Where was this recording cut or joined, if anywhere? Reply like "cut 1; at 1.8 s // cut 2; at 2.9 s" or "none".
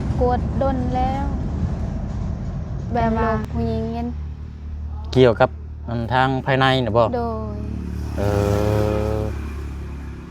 cut 1; at 3.1 s